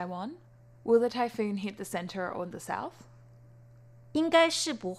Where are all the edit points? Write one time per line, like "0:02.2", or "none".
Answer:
0:03.4